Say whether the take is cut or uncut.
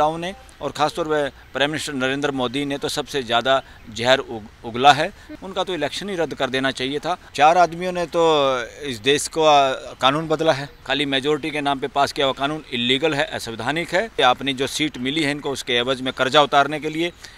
cut